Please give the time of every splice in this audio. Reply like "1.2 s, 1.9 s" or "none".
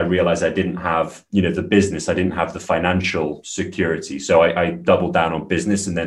3.5 s